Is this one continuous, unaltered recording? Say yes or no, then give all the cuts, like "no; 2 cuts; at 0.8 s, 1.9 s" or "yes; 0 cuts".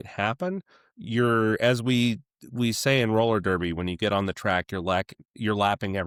yes; 0 cuts